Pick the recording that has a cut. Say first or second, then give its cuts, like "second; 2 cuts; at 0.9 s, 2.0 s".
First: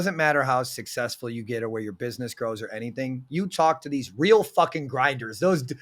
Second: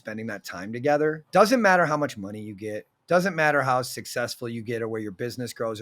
second; 1 cut; at 1.2 s